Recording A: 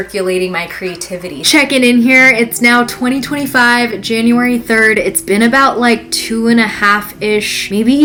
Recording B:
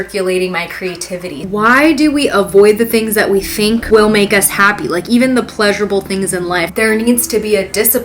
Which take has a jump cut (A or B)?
B